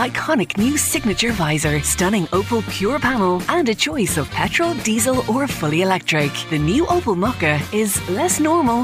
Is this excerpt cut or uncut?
uncut